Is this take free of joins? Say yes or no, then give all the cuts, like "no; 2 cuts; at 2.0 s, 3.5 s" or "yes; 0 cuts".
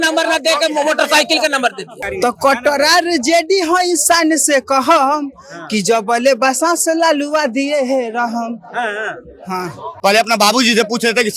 no; 2 cuts; at 2.0 s, 9.9 s